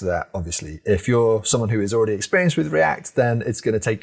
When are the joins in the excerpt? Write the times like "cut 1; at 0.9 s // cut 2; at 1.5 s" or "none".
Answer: none